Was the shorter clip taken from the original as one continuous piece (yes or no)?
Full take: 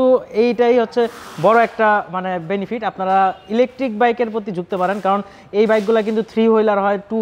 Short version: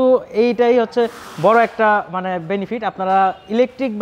yes